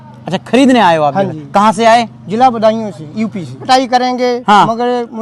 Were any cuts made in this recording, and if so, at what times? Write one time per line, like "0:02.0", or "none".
0:03.6